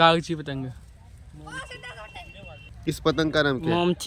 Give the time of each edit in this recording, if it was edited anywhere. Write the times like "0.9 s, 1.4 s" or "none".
3.0 s